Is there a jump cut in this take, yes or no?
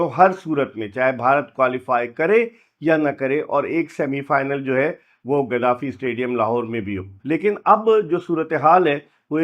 yes